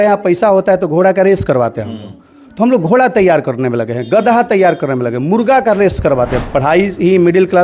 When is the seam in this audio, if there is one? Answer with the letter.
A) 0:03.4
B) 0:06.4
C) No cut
B